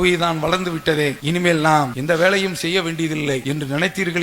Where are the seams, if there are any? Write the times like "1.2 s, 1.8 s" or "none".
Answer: 1.2 s, 2.0 s, 3.4 s